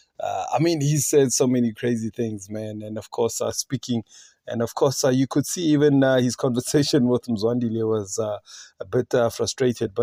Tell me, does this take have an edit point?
no; 0 cuts

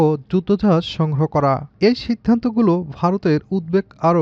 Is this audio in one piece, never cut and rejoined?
no; 1 cut; at 1.7 s

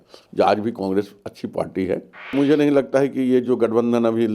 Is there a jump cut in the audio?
yes; 1 cut; at 2.3 s

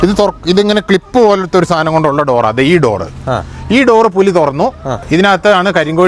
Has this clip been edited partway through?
yes; 1 cut; at 5.0 s

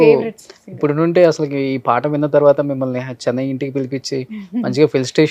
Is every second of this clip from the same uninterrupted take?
yes; 0 cuts

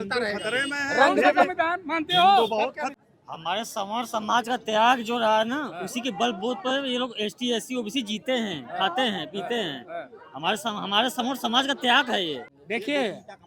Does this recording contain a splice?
yes; 2 cuts; at 3.0 s, 12.5 s

